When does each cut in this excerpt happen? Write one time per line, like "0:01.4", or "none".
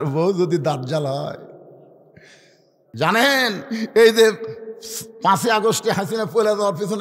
0:02.8